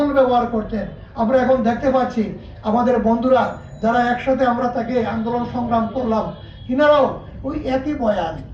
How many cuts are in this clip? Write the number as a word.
zero